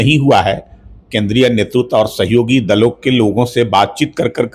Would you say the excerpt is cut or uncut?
uncut